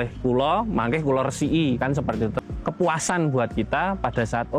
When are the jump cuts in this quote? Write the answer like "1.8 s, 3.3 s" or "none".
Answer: 2.3 s